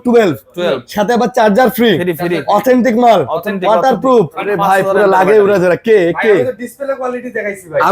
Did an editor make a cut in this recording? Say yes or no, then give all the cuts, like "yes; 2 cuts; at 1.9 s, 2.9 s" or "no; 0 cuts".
yes; 1 cut; at 4.4 s